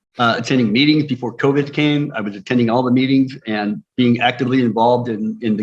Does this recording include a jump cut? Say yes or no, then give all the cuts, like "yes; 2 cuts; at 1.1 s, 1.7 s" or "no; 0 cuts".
no; 0 cuts